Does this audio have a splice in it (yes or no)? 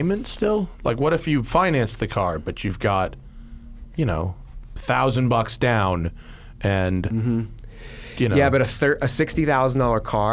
no